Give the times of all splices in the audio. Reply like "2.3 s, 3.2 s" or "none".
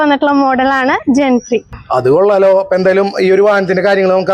none